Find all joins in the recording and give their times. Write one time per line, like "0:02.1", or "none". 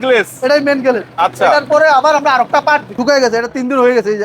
0:02.9